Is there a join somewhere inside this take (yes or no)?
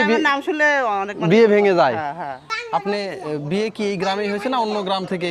yes